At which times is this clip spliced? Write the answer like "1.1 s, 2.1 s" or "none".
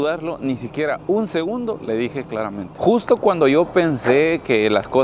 2.7 s